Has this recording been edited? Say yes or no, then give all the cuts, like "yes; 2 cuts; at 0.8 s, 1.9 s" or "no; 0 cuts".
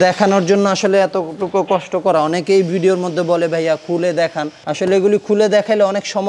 no; 0 cuts